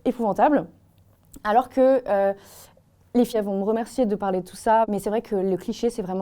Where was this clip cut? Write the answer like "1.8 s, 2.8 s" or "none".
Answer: 3.3 s, 4.9 s